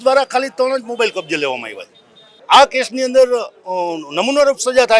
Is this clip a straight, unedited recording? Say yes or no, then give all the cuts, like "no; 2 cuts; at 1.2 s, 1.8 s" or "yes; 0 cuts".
no; 1 cut; at 2.4 s